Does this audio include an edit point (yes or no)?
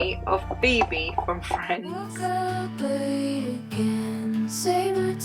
yes